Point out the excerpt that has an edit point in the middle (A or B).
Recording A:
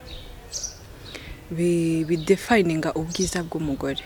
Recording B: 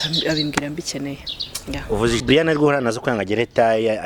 B